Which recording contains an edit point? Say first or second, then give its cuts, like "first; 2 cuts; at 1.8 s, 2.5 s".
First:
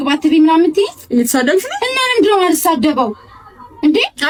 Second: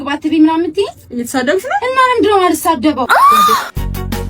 second; 1 cut; at 3.2 s